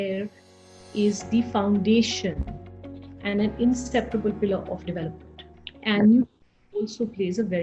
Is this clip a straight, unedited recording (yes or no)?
yes